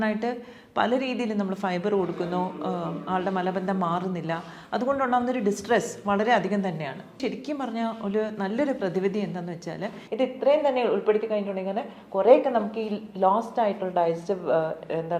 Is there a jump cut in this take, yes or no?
yes